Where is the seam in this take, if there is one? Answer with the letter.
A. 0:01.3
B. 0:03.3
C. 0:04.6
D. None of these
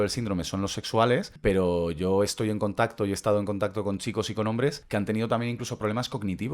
D